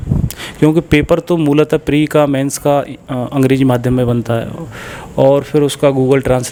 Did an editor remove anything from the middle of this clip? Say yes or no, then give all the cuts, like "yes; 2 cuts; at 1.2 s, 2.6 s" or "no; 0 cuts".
no; 0 cuts